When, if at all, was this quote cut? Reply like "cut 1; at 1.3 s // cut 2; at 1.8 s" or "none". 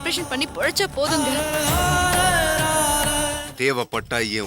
cut 1; at 3.4 s